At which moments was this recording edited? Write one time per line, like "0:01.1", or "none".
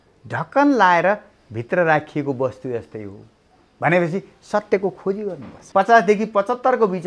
0:05.6